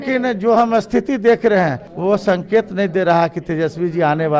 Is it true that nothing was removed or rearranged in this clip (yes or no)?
no